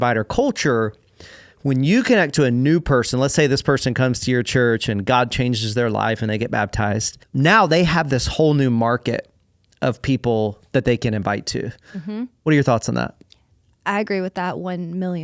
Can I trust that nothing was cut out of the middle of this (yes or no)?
no